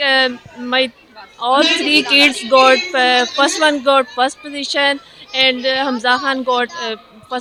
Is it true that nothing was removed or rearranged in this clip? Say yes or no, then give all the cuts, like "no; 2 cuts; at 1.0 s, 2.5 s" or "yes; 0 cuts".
yes; 0 cuts